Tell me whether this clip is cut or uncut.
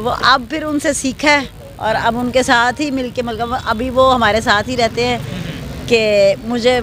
uncut